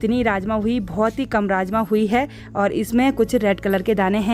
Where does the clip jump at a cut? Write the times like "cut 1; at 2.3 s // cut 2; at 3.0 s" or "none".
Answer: none